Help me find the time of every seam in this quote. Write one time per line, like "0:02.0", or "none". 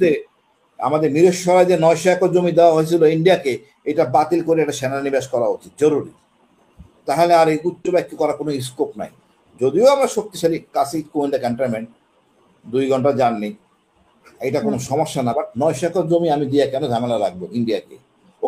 none